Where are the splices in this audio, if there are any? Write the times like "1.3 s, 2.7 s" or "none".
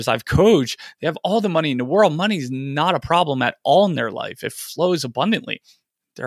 none

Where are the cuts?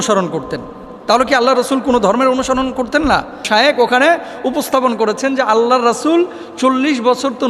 3.5 s

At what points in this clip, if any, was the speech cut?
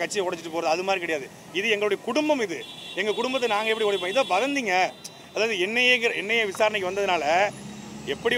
none

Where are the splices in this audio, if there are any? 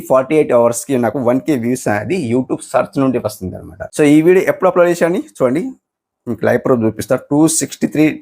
3.9 s

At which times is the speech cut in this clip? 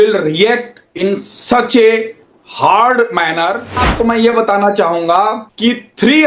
3.8 s

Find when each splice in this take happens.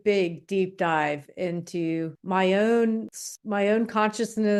none

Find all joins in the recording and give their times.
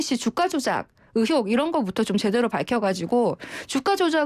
none

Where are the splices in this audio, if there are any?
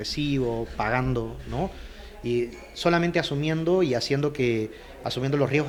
none

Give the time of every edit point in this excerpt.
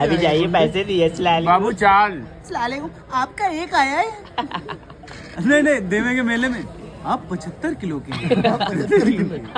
none

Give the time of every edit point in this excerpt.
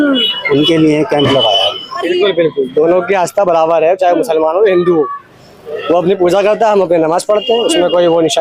2.0 s

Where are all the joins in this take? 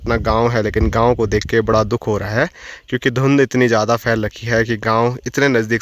none

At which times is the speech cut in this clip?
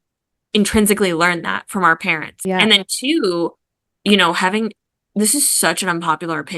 2.3 s

